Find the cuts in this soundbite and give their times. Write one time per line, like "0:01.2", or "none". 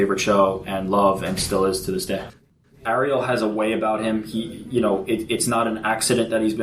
0:02.4